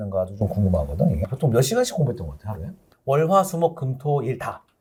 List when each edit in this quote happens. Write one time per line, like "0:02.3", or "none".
none